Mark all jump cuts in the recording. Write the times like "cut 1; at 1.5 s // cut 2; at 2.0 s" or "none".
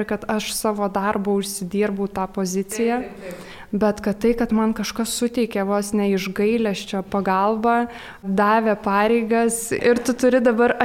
cut 1; at 9.8 s